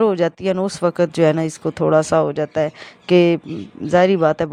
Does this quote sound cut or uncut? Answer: uncut